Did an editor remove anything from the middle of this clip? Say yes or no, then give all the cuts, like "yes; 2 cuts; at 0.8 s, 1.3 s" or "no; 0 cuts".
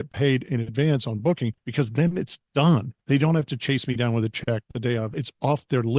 yes; 3 cuts; at 1.6 s, 2.9 s, 5.1 s